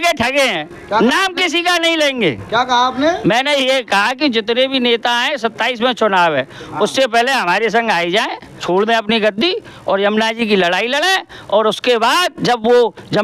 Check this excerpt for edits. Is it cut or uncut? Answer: cut